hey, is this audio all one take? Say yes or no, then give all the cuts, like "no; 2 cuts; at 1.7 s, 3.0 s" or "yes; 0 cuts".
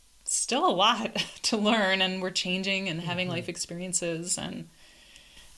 yes; 0 cuts